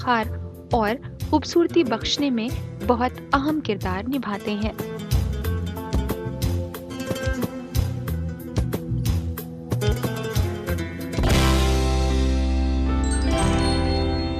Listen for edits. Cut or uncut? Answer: cut